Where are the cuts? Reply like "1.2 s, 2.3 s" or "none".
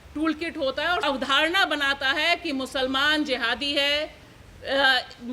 1.0 s

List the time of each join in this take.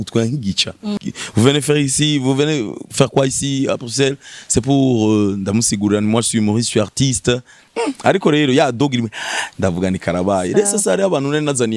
1.0 s

